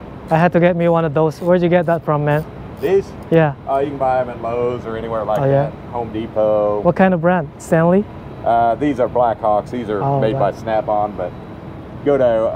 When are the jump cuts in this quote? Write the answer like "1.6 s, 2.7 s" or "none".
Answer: none